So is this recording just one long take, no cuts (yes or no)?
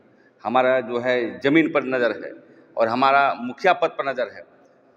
yes